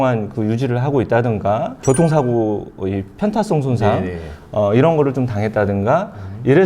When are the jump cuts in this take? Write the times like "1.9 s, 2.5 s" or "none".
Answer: none